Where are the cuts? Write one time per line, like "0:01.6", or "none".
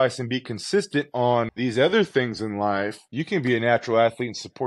0:01.5
0:03.1